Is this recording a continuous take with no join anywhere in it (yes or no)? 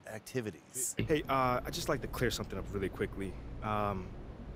no